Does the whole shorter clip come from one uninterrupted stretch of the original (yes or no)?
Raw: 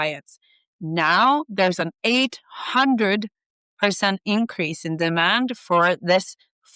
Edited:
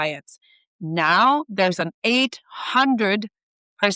yes